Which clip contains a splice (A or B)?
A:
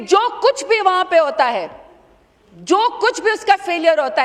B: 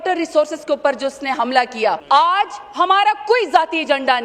B